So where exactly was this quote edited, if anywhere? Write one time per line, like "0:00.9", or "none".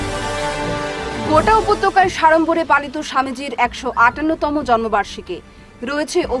0:01.1